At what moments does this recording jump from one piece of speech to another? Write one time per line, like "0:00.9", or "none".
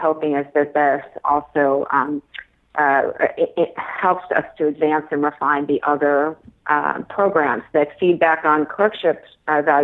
none